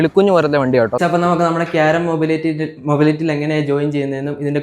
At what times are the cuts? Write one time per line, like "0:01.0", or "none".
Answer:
0:01.0